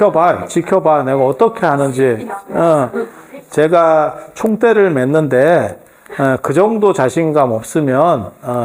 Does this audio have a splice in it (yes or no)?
no